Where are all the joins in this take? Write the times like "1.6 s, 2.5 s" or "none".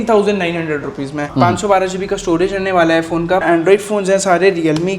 1.3 s, 3.4 s